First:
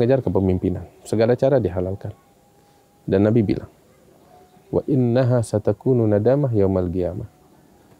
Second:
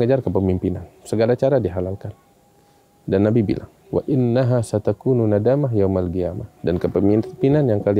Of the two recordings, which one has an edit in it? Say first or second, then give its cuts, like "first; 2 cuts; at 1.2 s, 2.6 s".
second; 2 cuts; at 3.7 s, 6.4 s